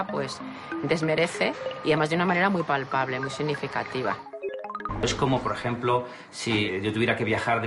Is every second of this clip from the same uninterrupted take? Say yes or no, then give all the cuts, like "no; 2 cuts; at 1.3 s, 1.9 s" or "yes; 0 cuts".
no; 2 cuts; at 4.6 s, 6.7 s